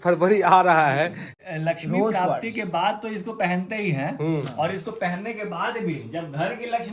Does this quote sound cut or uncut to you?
cut